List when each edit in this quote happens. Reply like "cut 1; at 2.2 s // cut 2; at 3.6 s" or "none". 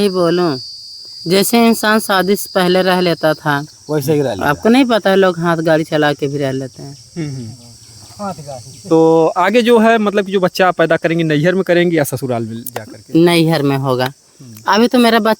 cut 1; at 8.7 s